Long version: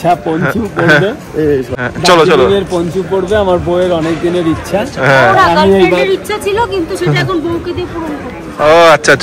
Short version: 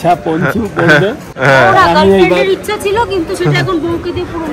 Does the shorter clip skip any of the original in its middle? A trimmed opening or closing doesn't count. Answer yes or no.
yes